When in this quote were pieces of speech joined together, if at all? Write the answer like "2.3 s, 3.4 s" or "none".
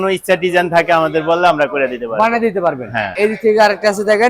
none